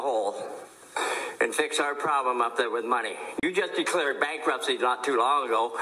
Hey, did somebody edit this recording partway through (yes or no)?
yes